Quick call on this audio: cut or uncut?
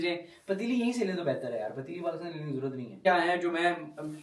cut